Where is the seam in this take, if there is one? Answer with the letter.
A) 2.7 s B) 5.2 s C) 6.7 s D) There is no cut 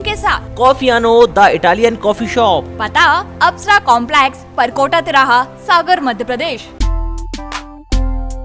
C